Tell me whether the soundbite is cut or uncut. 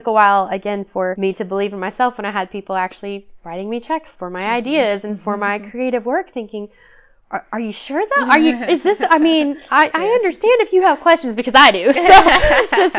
cut